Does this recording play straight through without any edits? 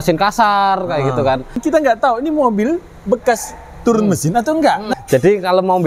no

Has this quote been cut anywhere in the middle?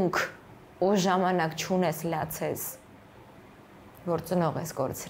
no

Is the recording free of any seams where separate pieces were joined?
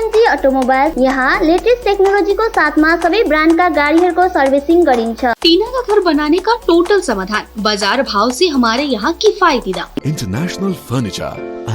no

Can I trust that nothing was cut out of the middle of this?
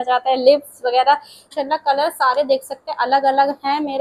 no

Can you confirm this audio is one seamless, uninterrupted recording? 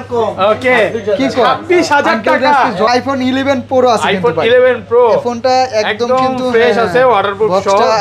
no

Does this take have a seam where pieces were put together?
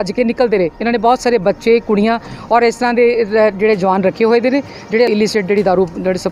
yes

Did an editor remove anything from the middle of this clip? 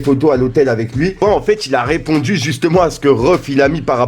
yes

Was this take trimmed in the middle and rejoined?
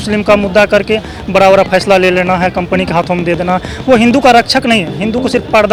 no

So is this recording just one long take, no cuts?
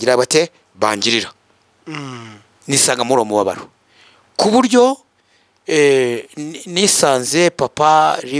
yes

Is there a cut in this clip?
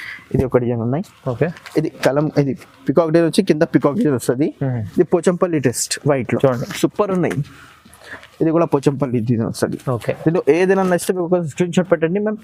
no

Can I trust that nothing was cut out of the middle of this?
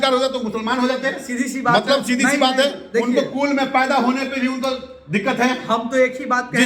yes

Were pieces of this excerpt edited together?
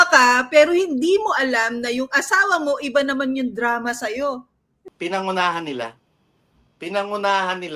yes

